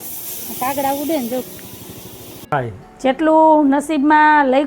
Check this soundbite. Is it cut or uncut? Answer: cut